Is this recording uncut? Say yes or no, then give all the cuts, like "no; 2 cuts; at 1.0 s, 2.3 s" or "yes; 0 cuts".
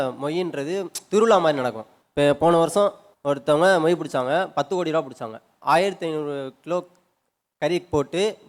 yes; 0 cuts